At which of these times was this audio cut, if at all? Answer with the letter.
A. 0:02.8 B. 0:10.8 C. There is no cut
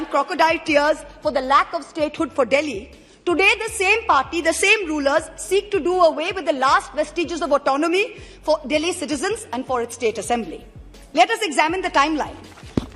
C